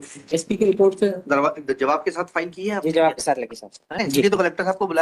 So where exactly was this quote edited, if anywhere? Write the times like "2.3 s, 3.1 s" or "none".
4.0 s

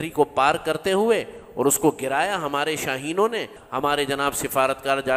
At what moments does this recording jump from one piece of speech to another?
3.6 s

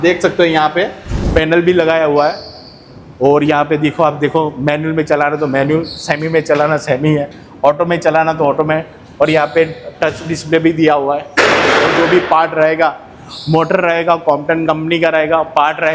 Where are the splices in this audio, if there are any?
1.2 s

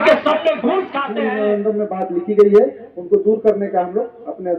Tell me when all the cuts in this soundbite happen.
1.0 s

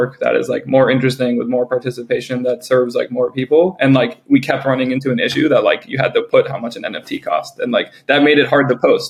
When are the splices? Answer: none

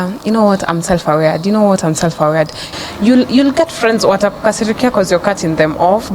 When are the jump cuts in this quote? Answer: 2.7 s

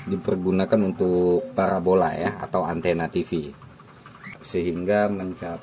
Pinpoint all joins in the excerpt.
4.3 s

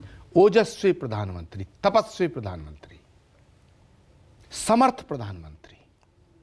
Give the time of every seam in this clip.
none

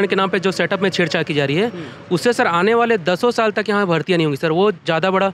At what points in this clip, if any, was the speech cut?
none

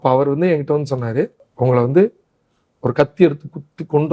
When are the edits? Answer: 1.4 s

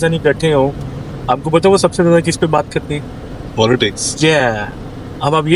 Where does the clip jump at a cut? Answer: none

